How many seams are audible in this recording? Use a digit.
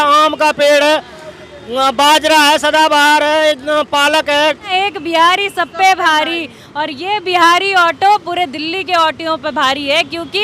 1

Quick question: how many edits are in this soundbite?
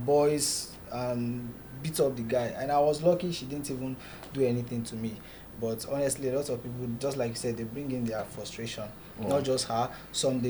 0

